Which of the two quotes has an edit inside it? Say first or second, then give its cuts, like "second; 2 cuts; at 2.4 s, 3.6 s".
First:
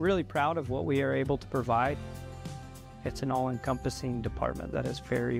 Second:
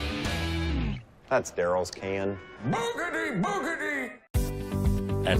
second; 1 cut; at 4.4 s